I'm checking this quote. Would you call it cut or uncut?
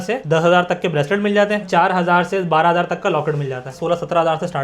cut